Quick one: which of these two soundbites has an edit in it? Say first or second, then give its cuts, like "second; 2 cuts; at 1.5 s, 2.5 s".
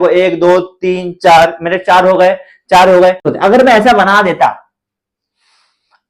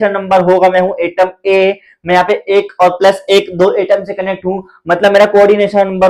first; 1 cut; at 3.3 s